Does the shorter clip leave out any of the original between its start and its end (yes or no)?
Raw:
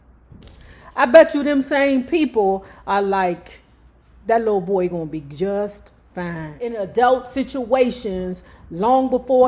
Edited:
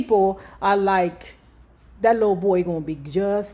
no